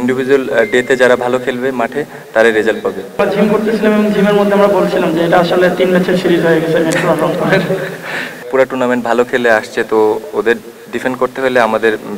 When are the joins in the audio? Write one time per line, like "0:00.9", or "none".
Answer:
0:03.2
0:08.4